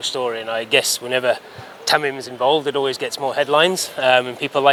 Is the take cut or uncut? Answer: uncut